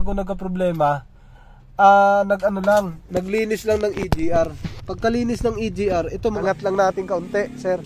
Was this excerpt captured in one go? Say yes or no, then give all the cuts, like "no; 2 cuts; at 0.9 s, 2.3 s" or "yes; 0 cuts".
no; 1 cut; at 6.4 s